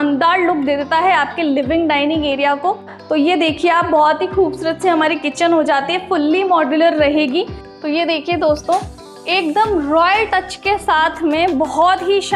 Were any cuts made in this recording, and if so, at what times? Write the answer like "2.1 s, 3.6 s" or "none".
2.8 s, 7.6 s